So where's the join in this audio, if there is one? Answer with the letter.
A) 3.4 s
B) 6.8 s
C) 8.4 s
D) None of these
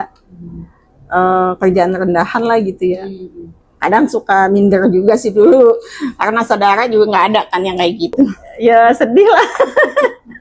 C